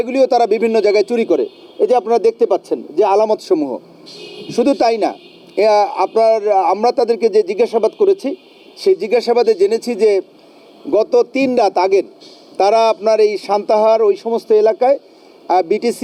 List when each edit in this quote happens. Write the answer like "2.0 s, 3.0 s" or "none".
none

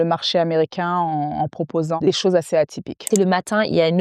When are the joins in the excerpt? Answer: 2.0 s, 3.1 s

